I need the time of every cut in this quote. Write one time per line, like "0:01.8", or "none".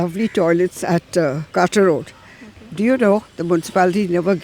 0:01.4